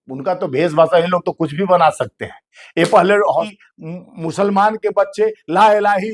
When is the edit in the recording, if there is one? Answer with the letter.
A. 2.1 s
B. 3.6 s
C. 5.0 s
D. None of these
B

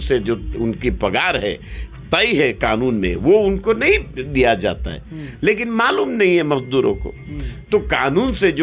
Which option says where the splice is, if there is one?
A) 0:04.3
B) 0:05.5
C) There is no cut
C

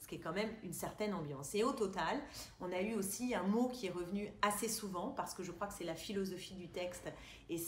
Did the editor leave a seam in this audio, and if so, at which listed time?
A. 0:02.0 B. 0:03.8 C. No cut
C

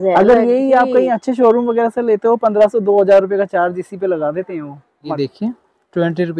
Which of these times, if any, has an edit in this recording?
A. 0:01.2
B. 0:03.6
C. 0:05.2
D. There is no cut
C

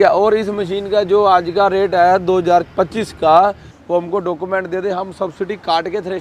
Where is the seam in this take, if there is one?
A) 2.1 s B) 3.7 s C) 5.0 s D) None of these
B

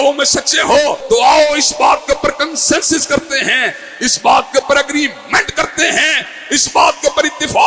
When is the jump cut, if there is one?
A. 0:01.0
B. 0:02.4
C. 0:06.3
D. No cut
A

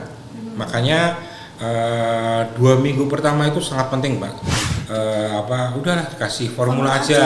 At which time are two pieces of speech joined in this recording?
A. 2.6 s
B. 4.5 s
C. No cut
B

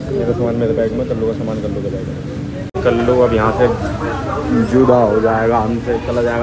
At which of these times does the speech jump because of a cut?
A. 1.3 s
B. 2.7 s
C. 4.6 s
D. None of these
B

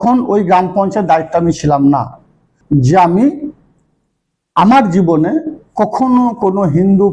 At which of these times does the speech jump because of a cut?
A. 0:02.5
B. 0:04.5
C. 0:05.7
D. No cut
A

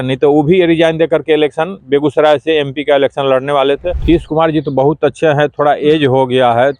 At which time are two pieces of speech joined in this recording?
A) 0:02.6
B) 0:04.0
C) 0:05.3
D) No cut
B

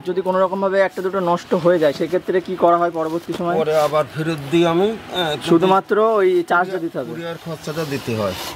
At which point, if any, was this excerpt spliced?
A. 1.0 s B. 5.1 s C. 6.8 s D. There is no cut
D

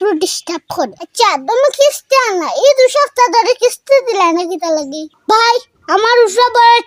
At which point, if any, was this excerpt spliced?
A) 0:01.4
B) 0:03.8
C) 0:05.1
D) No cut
C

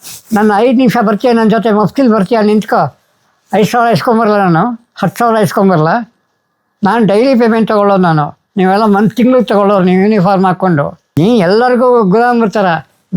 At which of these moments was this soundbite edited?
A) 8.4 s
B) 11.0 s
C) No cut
B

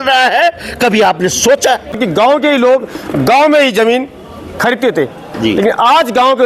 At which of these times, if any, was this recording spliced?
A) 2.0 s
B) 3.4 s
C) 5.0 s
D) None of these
A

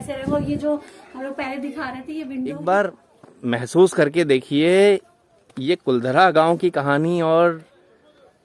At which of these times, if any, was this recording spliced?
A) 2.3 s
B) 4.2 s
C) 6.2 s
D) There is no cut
A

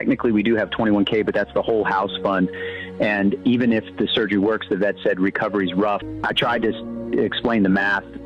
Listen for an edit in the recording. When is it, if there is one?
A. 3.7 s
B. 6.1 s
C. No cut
B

